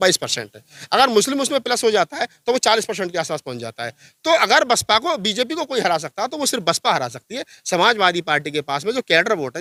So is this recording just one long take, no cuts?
yes; 0 cuts

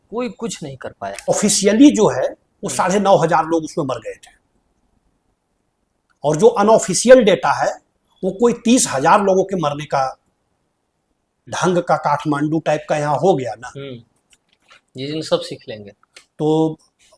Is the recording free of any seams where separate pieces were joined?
no; 2 cuts; at 1.3 s, 11.5 s

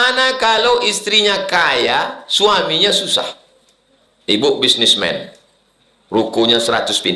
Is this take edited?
no; 0 cuts

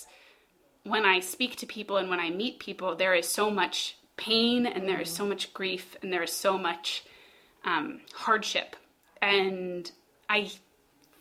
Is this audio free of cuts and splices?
yes; 0 cuts

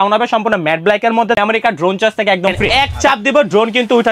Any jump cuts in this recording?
yes; 2 cuts; at 1.4 s, 2.9 s

